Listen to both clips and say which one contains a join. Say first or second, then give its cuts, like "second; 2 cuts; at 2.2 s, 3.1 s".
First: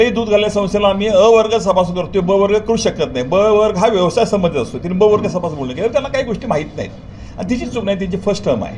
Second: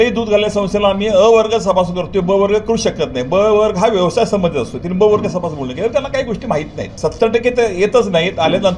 second; 1 cut; at 6.8 s